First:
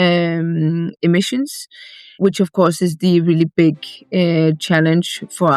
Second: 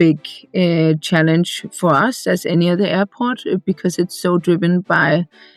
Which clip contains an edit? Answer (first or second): first